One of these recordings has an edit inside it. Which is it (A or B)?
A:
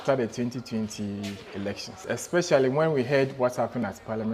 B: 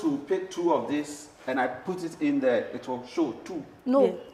A